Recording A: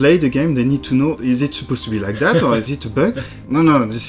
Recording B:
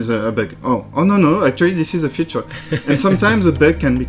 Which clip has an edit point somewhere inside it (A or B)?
A